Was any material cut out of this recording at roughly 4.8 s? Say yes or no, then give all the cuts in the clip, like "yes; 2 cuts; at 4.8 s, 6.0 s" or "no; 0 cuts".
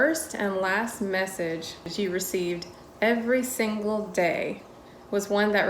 no; 1 cut; at 1.9 s